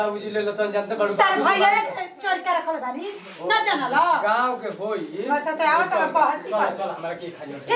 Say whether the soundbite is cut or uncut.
uncut